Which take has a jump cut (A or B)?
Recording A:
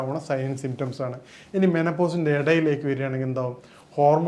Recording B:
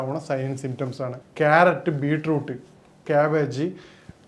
B